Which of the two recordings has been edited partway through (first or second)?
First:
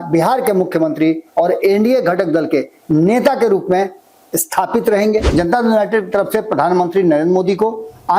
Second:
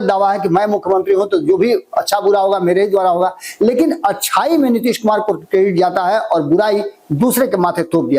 first